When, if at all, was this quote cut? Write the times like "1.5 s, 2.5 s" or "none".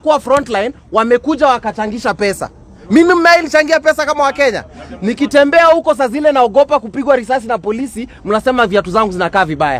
none